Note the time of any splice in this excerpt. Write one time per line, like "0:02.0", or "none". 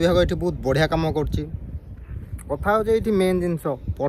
none

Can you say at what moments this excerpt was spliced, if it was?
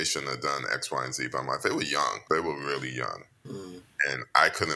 0:02.2

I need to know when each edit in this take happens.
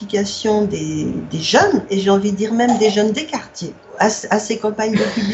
0:01.9
0:03.8

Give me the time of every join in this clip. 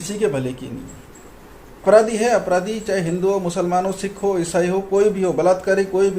0:01.8

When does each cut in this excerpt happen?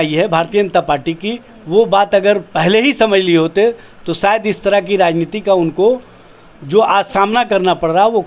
none

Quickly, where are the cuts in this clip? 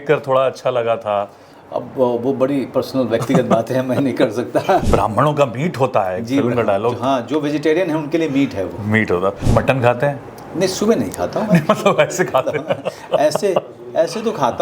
0:04.8
0:09.4

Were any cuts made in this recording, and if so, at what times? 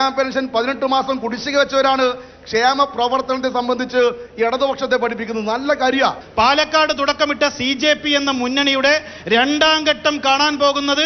0:06.2

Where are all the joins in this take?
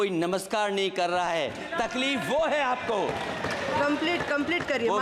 none

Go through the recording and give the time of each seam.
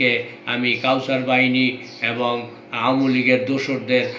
none

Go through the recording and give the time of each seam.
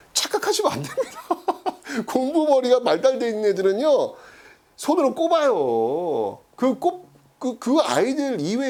none

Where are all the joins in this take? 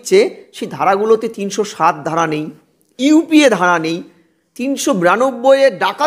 none

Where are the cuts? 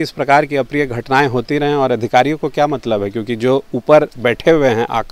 none

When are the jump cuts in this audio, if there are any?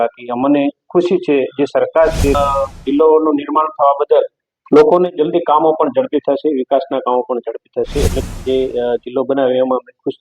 0:02.3
0:08.2

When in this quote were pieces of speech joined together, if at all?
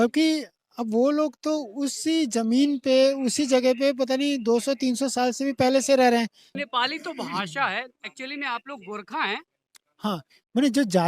0:06.6

